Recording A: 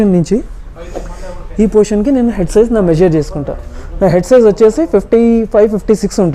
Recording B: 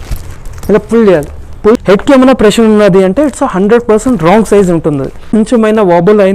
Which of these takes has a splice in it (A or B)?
B